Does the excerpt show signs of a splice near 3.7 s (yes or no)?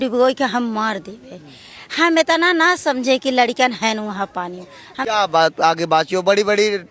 no